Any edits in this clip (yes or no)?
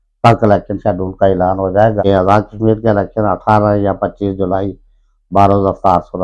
no